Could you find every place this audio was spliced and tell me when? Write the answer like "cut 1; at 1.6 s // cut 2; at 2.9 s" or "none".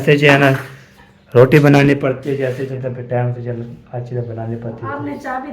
cut 1; at 2.7 s